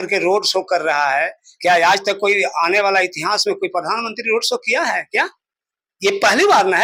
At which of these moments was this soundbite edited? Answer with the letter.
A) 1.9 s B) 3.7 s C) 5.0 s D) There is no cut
D